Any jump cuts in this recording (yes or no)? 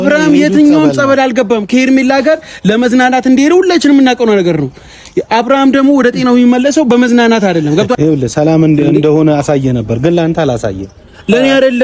yes